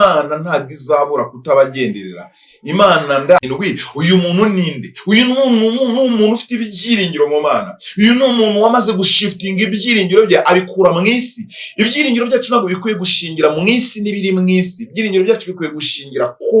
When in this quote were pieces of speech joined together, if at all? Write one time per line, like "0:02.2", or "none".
0:03.4